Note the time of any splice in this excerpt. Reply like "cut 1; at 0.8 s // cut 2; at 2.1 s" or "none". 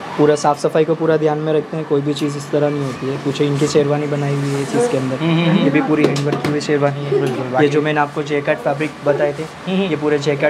none